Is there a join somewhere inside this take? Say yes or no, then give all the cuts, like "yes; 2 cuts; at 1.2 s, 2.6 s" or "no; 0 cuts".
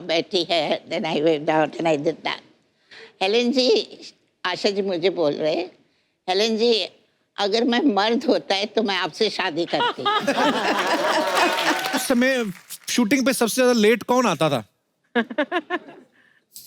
yes; 1 cut; at 12.0 s